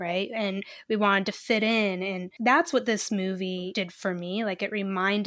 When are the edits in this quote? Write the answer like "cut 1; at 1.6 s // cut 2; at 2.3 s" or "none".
cut 1; at 2.2 s // cut 2; at 3.7 s

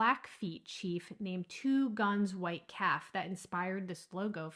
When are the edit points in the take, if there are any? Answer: none

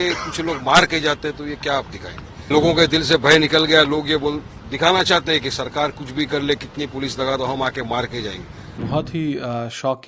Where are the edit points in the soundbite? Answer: cut 1; at 2.5 s // cut 2; at 8.8 s

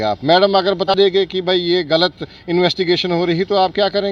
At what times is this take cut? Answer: cut 1; at 0.9 s

